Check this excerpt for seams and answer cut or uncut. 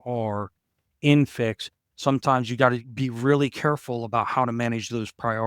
cut